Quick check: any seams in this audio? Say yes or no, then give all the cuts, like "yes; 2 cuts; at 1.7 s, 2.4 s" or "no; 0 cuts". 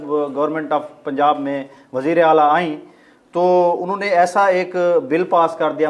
no; 0 cuts